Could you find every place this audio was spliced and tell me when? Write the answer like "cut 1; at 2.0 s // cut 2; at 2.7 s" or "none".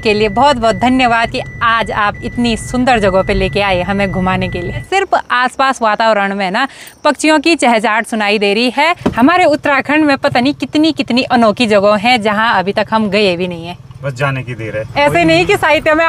cut 1; at 4.8 s // cut 2; at 9.0 s // cut 3; at 14.8 s